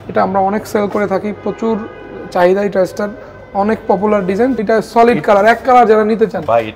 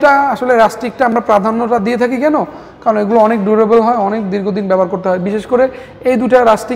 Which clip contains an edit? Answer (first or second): first